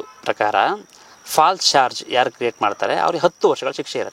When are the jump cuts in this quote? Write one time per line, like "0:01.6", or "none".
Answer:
none